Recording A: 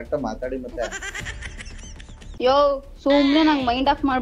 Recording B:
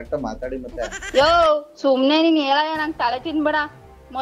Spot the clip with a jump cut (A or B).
B